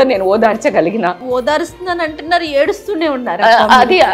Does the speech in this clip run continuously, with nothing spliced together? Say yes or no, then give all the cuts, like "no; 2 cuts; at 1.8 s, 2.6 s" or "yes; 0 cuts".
no; 1 cut; at 1.2 s